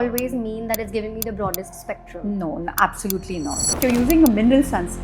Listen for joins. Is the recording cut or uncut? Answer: cut